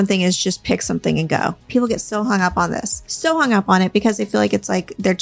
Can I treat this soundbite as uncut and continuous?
no; 2 cuts; at 1.7 s, 3.0 s

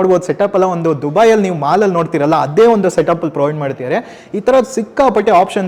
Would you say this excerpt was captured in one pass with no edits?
yes; 0 cuts

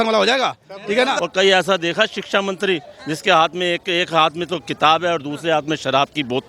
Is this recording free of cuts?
no; 1 cut; at 1.2 s

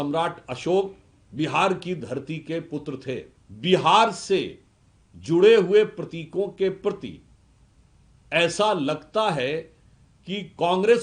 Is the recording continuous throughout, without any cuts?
no; 1 cut; at 3.4 s

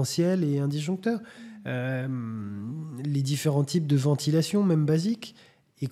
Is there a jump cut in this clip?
no; 0 cuts

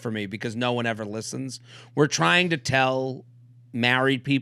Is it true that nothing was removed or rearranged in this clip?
yes; 0 cuts

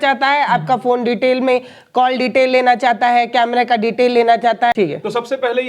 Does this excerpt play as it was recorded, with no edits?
no; 1 cut; at 4.7 s

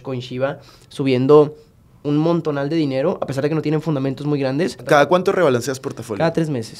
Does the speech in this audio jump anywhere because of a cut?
yes; 1 cut; at 4.8 s

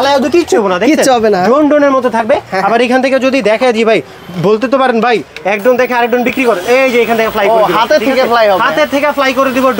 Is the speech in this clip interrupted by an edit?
no; 0 cuts

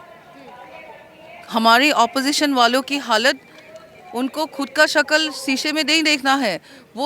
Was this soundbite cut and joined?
no; 0 cuts

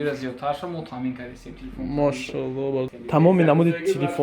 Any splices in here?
yes; 1 cut; at 2.9 s

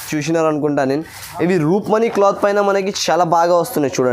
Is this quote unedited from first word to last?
yes; 0 cuts

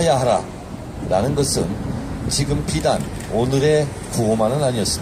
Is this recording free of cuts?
yes; 0 cuts

